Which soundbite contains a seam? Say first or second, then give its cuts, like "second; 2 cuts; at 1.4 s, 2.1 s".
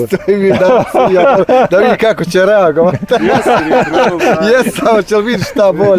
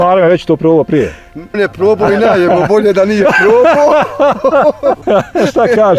second; 2 cuts; at 1.6 s, 5.0 s